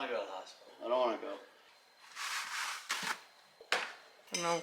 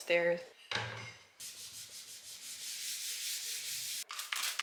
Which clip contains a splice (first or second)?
first